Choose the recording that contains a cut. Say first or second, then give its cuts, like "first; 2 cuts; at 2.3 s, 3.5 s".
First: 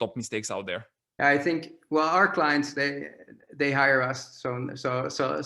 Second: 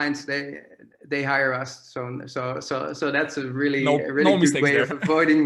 first; 1 cut; at 1.0 s